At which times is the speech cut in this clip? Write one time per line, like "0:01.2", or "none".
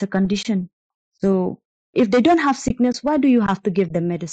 0:01.4